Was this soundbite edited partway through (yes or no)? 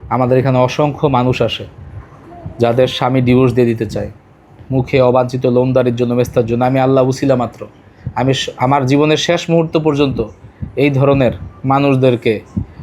no